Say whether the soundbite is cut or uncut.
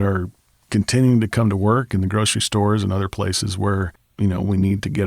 cut